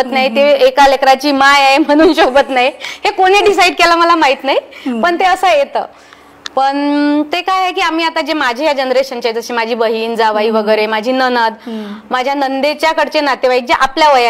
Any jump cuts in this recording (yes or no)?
no